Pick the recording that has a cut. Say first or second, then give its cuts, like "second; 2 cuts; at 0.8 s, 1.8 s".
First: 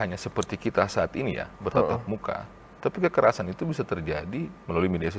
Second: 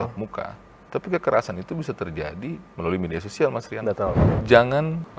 second; 1 cut; at 4.3 s